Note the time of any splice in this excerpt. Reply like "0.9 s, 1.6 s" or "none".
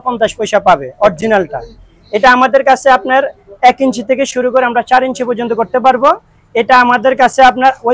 none